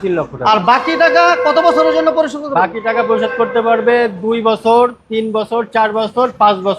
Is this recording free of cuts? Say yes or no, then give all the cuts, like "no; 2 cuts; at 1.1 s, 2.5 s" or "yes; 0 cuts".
yes; 0 cuts